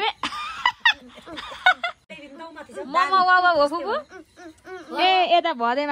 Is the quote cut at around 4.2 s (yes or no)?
no